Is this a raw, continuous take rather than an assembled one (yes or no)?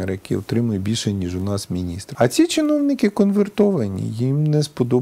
no